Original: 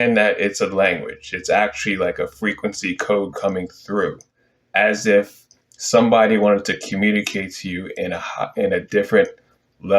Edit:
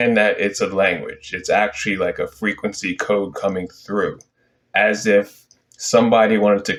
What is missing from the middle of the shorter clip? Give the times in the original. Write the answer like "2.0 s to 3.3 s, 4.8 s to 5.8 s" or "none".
none